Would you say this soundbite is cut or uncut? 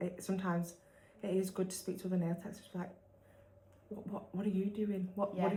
uncut